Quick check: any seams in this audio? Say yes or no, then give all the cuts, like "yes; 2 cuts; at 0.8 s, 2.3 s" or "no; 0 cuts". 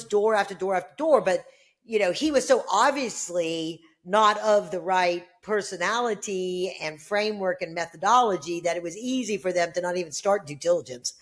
no; 0 cuts